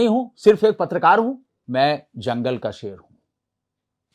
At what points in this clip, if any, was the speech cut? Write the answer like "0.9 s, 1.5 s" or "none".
1.5 s